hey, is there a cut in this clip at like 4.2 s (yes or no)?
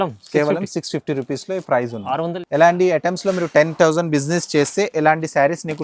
no